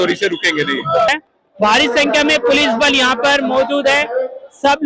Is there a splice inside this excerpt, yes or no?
yes